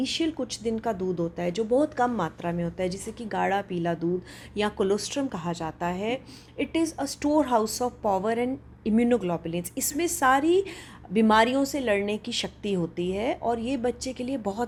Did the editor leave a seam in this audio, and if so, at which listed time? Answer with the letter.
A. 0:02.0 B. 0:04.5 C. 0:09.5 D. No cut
D